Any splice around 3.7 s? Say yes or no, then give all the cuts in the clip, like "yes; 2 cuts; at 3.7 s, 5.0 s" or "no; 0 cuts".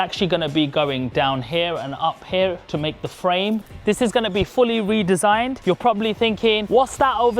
yes; 1 cut; at 3.7 s